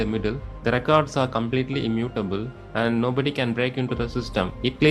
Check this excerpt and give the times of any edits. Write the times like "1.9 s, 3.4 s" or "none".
none

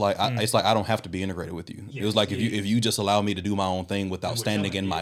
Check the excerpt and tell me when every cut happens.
none

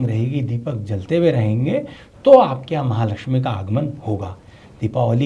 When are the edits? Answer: none

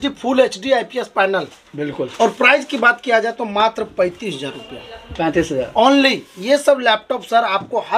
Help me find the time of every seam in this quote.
none

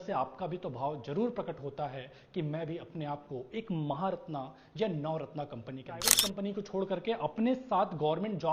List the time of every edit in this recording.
6.1 s

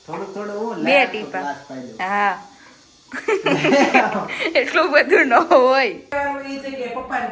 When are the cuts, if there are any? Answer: 6.1 s

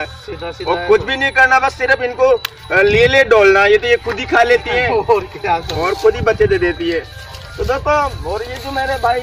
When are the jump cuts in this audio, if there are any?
none

